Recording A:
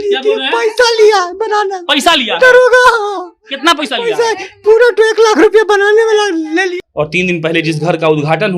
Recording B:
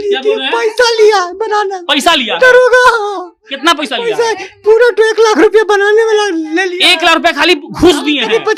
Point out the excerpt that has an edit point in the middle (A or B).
A